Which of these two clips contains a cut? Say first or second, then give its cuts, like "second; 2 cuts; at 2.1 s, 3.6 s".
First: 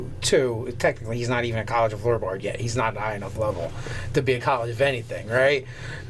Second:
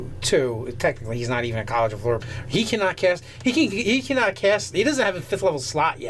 first; 1 cut; at 2.2 s